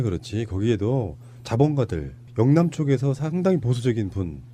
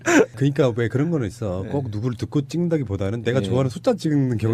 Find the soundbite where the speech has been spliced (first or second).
first